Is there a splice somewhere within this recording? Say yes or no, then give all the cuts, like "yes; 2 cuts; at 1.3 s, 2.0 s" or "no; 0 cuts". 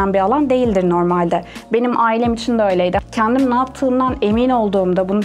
yes; 1 cut; at 3.0 s